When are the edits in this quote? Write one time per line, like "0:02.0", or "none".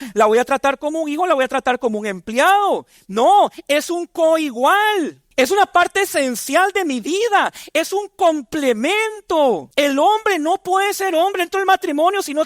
0:05.2
0:09.7